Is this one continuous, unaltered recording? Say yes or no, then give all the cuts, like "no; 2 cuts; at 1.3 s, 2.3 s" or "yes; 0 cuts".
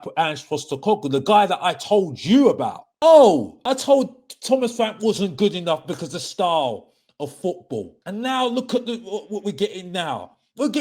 no; 3 cuts; at 2.8 s, 3.5 s, 8.0 s